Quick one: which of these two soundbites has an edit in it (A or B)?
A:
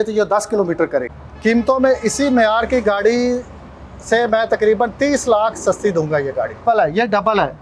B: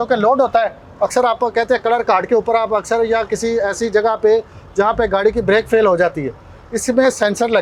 A